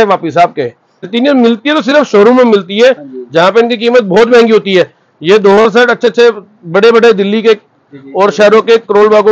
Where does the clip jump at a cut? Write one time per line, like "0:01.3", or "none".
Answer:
0:00.9